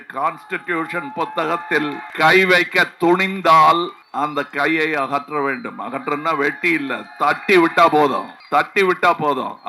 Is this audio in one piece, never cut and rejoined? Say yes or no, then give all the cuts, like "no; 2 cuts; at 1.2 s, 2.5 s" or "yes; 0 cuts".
no; 3 cuts; at 2.0 s, 4.0 s, 8.3 s